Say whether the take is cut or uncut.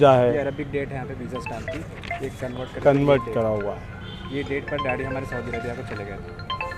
uncut